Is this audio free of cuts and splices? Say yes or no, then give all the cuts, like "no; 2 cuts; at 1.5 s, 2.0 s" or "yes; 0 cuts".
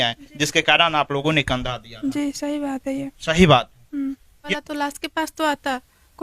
no; 1 cut; at 4.3 s